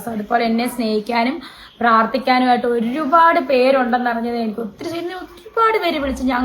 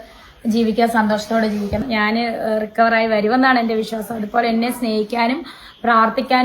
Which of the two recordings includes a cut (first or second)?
second